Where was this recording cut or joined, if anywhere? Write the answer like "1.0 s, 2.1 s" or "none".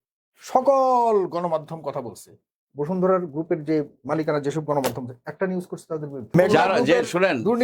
6.3 s